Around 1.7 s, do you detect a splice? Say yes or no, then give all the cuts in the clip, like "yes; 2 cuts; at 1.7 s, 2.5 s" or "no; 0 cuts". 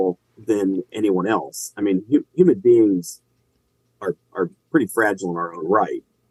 no; 0 cuts